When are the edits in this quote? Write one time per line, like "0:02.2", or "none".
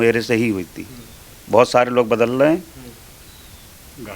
0:01.3